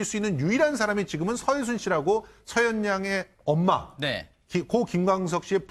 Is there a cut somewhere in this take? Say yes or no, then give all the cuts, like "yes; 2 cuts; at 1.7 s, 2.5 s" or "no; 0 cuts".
yes; 1 cut; at 4.2 s